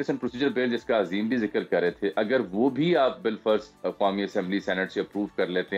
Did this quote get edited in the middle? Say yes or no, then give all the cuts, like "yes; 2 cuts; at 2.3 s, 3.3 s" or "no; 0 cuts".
no; 0 cuts